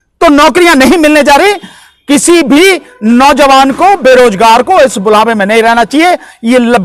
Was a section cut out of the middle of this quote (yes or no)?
no